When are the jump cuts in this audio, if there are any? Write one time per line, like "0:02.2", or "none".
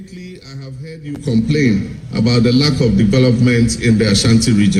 none